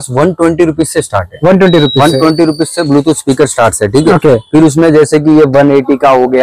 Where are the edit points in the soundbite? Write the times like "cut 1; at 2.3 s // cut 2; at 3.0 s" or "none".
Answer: none